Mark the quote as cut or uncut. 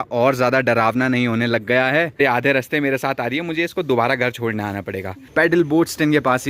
cut